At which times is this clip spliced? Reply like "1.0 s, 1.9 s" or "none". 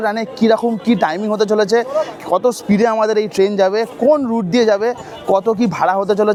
none